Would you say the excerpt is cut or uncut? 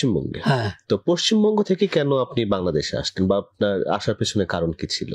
uncut